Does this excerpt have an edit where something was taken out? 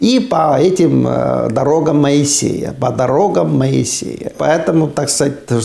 yes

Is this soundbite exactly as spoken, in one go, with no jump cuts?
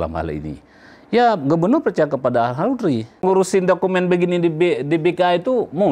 no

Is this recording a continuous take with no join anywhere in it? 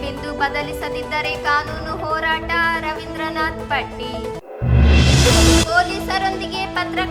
yes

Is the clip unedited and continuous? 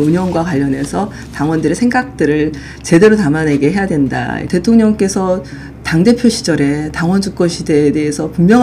no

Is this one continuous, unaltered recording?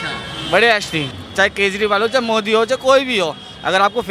no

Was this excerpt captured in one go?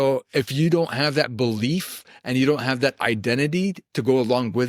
yes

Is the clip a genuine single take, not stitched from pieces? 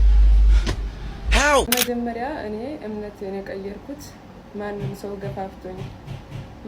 no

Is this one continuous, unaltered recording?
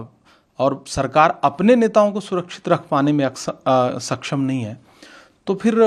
yes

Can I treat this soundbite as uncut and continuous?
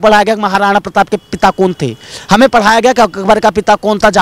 yes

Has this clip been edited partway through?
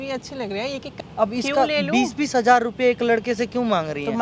yes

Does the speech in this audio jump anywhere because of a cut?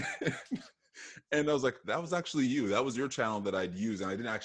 yes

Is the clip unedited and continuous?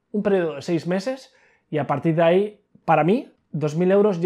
yes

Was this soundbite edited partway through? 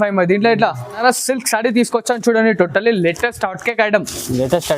yes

